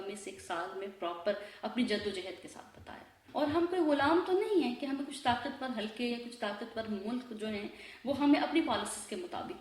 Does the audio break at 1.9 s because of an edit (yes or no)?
no